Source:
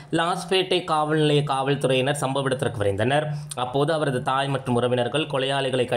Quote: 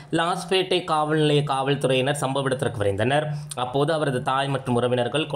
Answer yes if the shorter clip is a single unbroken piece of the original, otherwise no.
yes